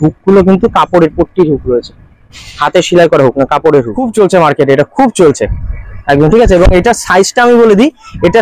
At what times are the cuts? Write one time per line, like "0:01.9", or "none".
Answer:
0:04.0